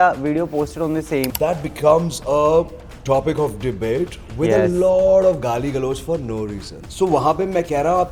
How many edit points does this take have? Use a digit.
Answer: 2